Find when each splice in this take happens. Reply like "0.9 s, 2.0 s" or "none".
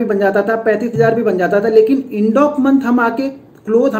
none